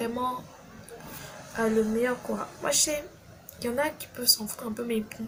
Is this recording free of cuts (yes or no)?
yes